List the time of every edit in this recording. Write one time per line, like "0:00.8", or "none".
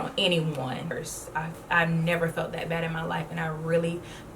0:00.9